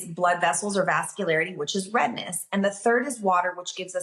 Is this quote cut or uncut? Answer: uncut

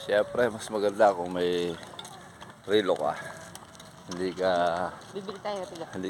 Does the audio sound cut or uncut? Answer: uncut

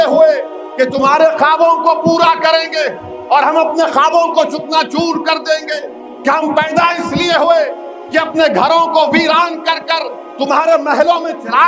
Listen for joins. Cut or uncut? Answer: uncut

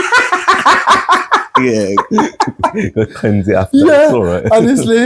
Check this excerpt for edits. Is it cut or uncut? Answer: uncut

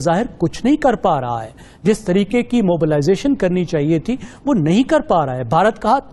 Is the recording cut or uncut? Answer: uncut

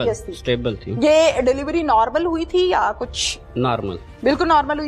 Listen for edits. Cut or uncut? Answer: uncut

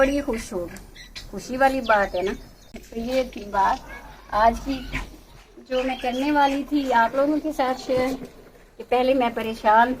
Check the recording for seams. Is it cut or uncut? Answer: cut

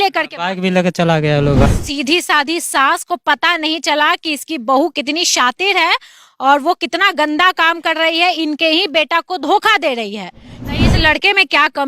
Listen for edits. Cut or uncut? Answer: cut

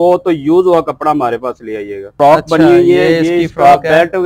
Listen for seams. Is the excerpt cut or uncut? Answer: cut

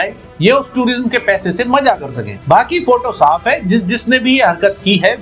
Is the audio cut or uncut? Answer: uncut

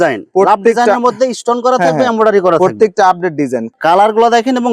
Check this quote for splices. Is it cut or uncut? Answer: cut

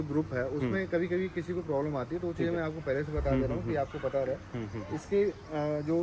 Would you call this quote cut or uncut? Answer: uncut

